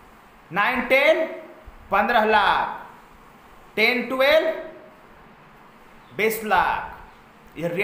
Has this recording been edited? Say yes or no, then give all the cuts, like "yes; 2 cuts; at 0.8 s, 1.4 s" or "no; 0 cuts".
no; 0 cuts